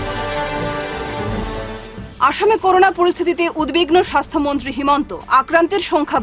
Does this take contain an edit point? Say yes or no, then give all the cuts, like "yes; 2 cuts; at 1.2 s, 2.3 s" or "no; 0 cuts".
no; 0 cuts